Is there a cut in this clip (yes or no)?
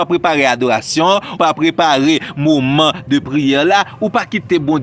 yes